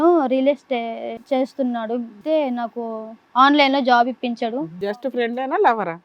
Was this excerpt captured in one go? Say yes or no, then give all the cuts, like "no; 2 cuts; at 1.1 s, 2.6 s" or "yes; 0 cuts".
no; 3 cuts; at 1.1 s, 2.2 s, 4.9 s